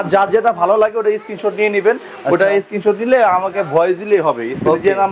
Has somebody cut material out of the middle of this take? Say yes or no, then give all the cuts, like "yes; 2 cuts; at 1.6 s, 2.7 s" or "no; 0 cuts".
no; 0 cuts